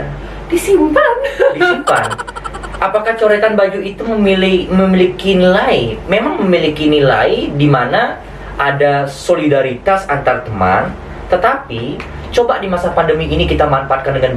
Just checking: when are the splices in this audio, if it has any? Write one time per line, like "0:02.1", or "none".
none